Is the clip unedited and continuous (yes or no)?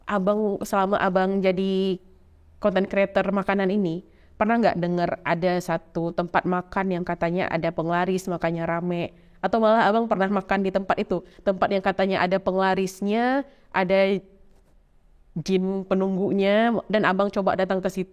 yes